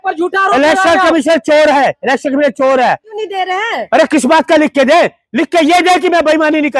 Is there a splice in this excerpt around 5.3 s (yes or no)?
no